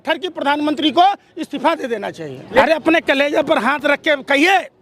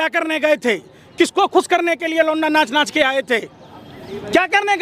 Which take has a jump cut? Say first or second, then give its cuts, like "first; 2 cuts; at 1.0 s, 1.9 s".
first; 1 cut; at 2.6 s